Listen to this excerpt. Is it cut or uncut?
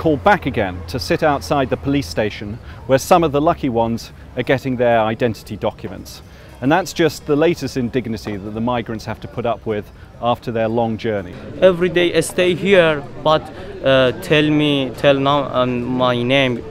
cut